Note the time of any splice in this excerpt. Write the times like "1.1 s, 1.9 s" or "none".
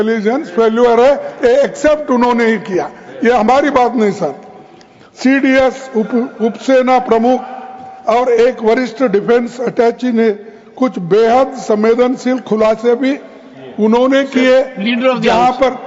none